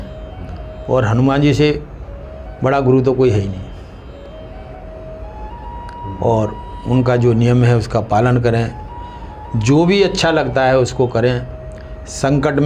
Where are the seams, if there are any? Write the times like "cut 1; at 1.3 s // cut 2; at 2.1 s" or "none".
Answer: none